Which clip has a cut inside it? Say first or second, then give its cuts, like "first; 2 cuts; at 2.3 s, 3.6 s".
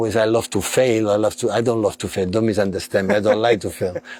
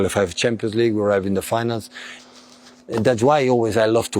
second; 1 cut; at 2.2 s